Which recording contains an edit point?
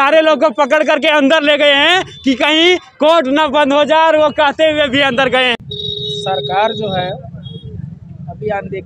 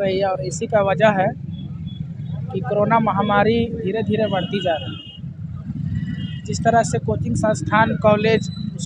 first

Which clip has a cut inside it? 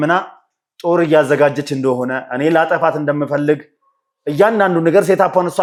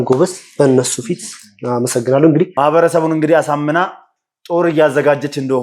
second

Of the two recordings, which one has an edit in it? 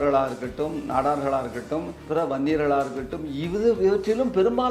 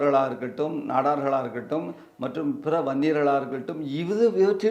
first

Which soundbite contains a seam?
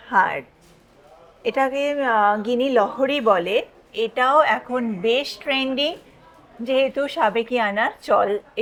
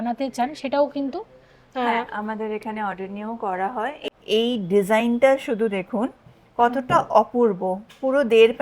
second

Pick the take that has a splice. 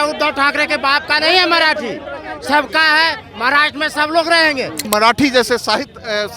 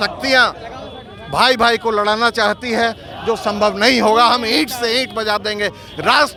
first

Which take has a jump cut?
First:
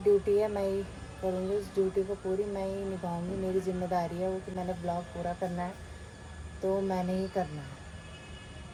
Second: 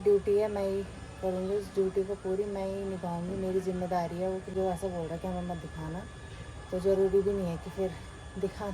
second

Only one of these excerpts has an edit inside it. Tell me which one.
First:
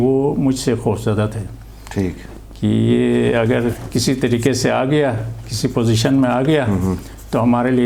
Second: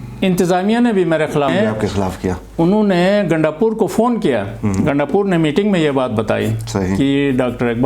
second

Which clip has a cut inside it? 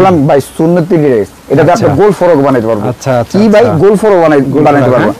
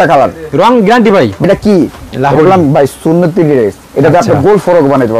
second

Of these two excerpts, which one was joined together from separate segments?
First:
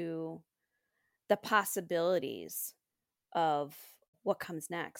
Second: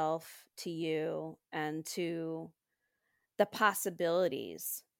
first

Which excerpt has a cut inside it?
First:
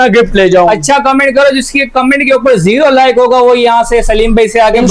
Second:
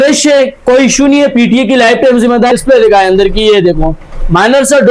second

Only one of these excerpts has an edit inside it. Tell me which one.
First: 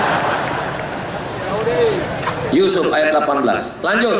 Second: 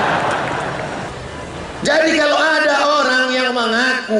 second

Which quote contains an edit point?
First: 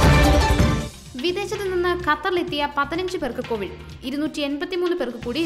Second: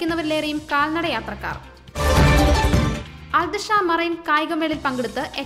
first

